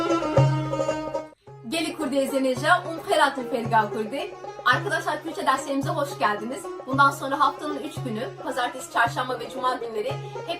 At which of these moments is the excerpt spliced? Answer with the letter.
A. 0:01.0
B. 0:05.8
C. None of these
A